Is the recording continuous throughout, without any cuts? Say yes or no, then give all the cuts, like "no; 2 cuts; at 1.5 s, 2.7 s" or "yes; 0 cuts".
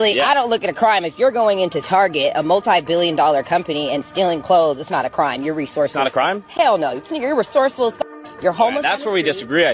yes; 0 cuts